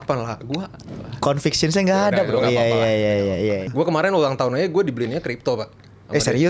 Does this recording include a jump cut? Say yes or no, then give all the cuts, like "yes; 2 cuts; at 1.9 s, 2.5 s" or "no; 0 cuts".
yes; 1 cut; at 3.7 s